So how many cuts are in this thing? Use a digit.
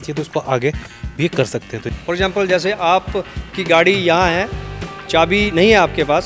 1